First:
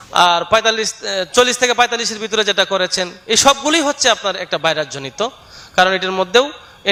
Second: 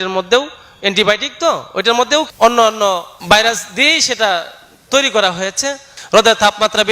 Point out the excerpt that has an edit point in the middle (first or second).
second